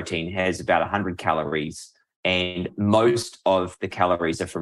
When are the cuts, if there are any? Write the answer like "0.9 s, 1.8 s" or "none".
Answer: 2.7 s